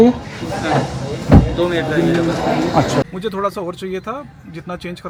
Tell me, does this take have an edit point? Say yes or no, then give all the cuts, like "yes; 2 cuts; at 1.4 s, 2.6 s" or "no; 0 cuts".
no; 0 cuts